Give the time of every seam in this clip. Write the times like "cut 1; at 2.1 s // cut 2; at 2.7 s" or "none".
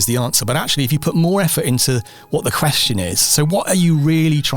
none